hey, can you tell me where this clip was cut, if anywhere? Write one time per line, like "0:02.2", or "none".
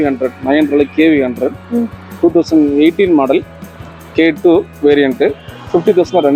none